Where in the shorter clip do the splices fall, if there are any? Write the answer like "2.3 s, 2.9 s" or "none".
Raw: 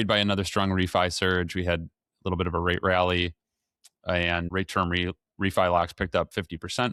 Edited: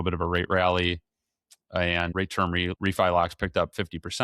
2.4 s